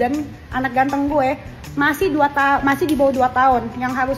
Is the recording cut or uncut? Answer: uncut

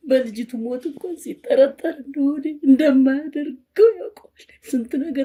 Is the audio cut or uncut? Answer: uncut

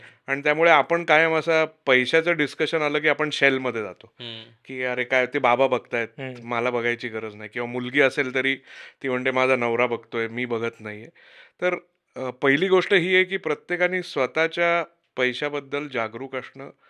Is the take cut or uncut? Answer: uncut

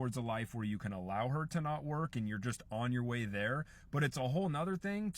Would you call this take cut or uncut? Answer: cut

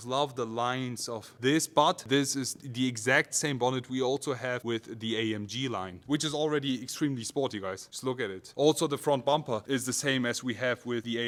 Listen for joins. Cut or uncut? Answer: uncut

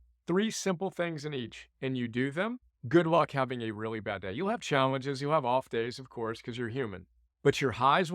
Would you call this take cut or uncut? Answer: cut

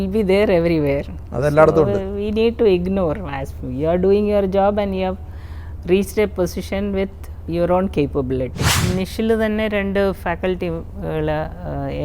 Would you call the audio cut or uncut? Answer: cut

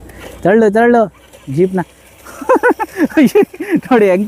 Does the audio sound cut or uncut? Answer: uncut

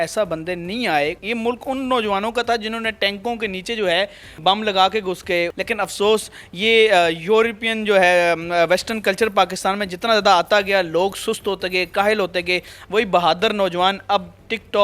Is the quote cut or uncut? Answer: cut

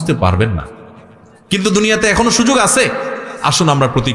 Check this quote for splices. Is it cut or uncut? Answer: uncut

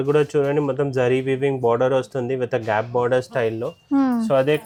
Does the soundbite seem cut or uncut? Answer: uncut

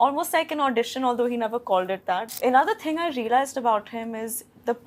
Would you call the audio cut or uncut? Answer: cut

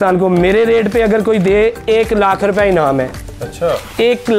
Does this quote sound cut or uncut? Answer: uncut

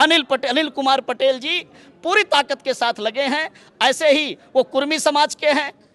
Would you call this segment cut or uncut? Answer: uncut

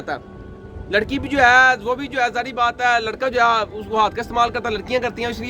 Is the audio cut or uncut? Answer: uncut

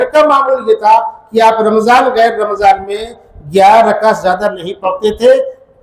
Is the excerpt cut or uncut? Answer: uncut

